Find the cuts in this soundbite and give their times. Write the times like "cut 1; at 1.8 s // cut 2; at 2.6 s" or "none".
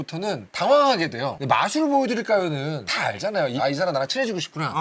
cut 1; at 3.6 s